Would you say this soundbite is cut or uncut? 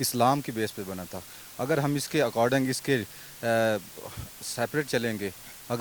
uncut